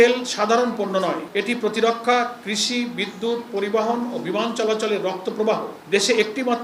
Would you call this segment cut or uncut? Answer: cut